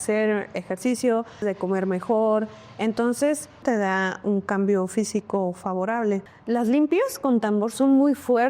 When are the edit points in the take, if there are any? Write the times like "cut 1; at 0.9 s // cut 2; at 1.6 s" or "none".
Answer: cut 1; at 1.4 s // cut 2; at 3.6 s // cut 3; at 6.3 s